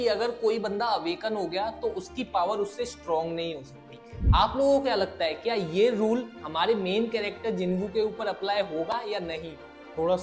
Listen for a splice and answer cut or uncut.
uncut